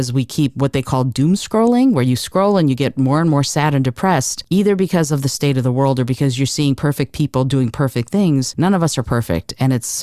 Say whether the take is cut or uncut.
cut